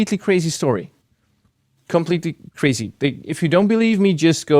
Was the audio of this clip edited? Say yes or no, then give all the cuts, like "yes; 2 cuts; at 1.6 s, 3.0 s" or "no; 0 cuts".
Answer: no; 0 cuts